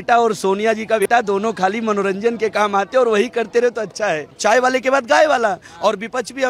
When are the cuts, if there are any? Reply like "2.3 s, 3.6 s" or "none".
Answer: 1.0 s, 4.3 s

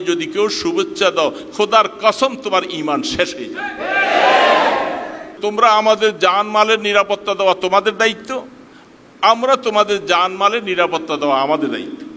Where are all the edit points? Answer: 5.3 s

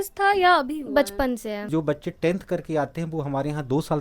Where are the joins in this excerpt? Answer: 1.7 s

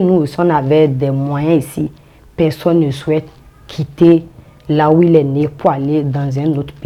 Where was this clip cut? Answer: none

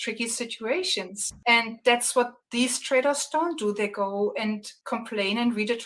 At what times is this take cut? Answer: 1.2 s, 2.4 s, 4.7 s

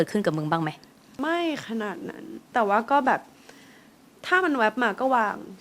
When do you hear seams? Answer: 1.2 s, 2.5 s

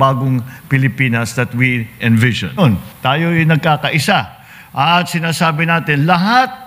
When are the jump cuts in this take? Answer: 2.6 s

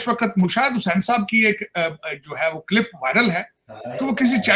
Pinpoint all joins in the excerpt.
none

